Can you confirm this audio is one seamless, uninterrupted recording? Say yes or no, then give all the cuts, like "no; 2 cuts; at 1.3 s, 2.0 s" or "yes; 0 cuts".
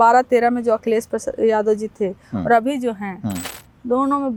yes; 0 cuts